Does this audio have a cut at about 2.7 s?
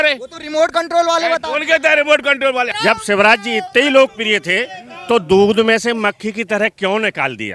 yes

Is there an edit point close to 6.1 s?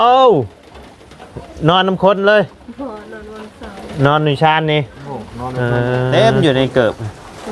yes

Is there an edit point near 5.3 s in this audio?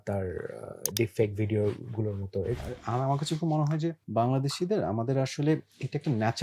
no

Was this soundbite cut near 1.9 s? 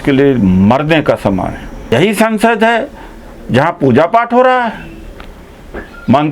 yes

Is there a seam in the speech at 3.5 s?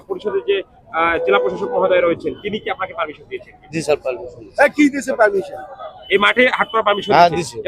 no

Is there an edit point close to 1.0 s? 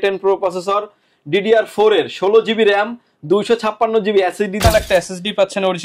no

